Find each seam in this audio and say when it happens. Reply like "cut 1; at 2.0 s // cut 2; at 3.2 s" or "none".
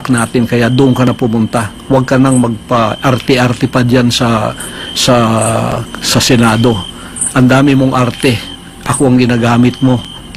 none